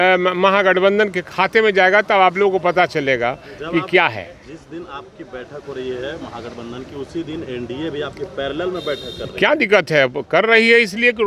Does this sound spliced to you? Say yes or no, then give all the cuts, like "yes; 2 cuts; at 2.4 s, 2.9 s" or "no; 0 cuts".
no; 0 cuts